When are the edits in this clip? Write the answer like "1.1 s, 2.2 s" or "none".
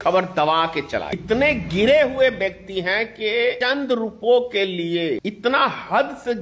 1.1 s, 3.6 s, 5.2 s